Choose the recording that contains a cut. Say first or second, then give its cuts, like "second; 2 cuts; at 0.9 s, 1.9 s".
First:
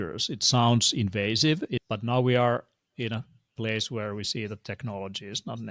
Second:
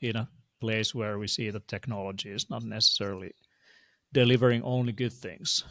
first; 1 cut; at 1.8 s